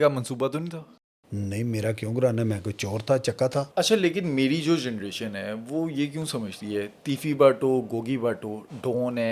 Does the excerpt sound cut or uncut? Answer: cut